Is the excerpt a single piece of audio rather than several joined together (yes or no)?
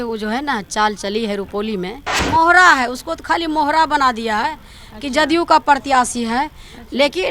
no